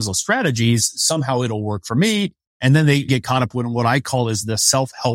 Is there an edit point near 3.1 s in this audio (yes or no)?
yes